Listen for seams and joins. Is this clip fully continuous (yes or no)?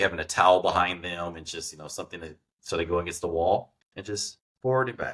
no